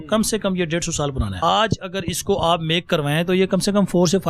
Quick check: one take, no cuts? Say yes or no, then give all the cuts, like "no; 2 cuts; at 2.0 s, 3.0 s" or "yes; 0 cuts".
no; 1 cut; at 1.4 s